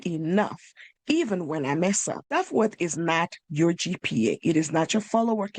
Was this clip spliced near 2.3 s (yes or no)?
yes